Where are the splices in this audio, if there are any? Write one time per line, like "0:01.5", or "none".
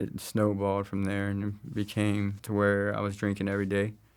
0:02.4